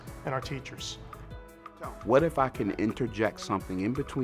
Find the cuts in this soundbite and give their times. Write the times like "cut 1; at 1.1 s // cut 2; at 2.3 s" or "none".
cut 1; at 1.5 s

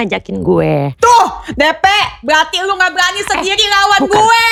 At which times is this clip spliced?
none

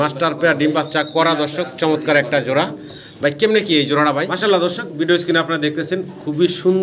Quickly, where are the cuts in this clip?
cut 1; at 4.3 s

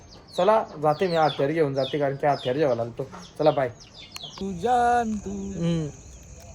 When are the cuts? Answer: cut 1; at 4.4 s

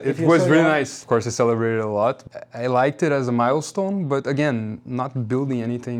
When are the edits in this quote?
cut 1; at 1.0 s // cut 2; at 2.2 s

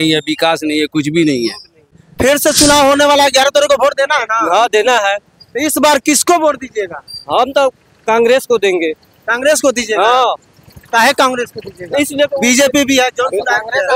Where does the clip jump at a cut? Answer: cut 1; at 2.0 s

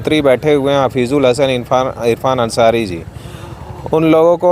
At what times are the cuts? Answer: none

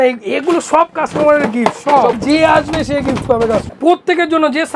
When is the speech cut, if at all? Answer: cut 1; at 2.2 s // cut 2; at 3.7 s

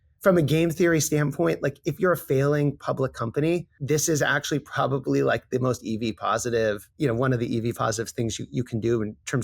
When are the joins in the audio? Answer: cut 1; at 3.8 s // cut 2; at 6.9 s

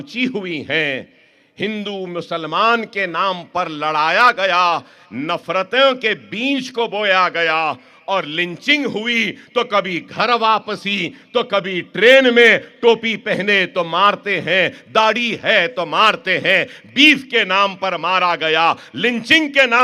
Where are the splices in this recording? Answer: none

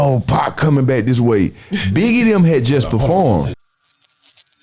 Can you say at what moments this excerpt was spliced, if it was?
cut 1; at 3.5 s

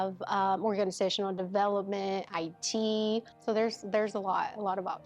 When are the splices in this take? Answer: cut 1; at 3.3 s

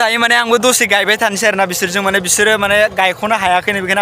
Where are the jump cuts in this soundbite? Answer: none

